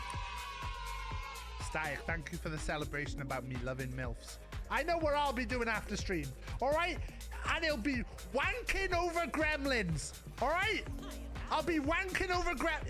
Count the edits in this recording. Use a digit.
0